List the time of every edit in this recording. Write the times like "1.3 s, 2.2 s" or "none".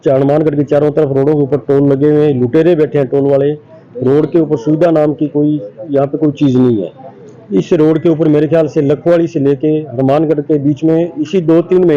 none